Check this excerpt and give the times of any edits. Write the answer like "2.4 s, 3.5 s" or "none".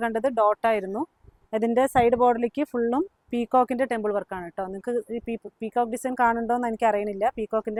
none